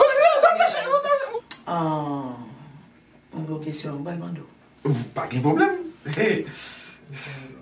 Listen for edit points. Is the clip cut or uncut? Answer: cut